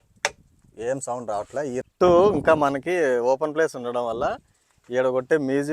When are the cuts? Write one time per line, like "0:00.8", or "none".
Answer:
0:01.8